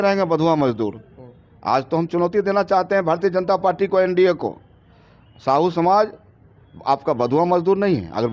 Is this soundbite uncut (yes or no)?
yes